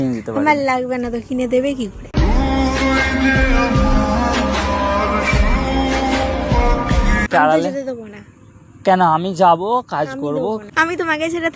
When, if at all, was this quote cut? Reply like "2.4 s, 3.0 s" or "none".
7.3 s